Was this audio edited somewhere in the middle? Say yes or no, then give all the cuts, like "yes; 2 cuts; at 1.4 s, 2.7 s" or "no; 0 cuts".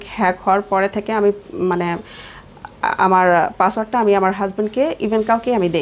no; 0 cuts